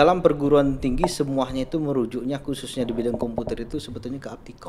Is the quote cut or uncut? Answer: uncut